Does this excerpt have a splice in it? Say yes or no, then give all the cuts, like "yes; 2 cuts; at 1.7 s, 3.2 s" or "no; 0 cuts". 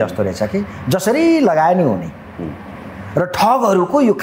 no; 0 cuts